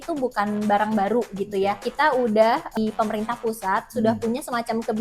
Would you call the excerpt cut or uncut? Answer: cut